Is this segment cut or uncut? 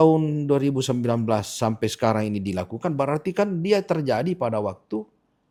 uncut